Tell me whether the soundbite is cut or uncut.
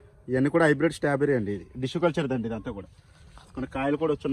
uncut